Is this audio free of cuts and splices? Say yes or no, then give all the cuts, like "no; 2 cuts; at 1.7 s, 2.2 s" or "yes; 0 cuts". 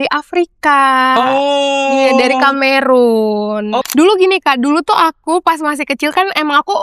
no; 1 cut; at 3.8 s